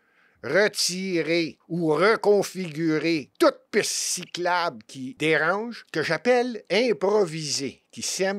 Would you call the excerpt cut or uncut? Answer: cut